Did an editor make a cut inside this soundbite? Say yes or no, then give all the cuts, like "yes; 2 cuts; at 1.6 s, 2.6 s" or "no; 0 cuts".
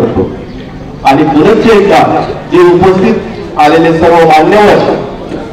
no; 0 cuts